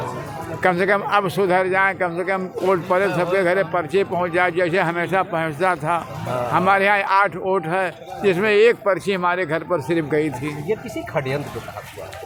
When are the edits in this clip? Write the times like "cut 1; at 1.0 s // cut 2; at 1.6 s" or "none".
none